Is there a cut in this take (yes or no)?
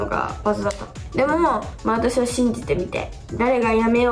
yes